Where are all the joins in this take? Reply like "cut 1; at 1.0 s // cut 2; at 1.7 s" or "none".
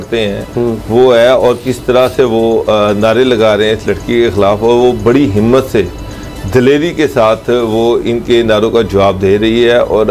none